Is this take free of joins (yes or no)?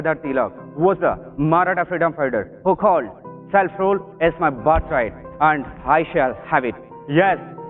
yes